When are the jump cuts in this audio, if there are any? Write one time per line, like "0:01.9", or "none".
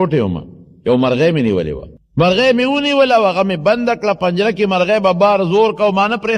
0:02.0